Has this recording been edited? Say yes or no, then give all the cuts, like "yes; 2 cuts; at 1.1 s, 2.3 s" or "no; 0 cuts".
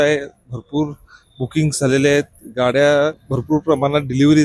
yes; 1 cut; at 3.3 s